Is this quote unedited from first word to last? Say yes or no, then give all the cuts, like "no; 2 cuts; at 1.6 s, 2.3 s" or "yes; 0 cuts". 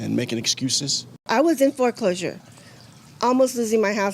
no; 1 cut; at 1.3 s